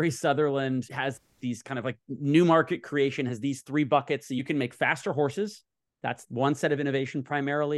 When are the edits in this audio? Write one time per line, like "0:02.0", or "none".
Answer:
0:00.9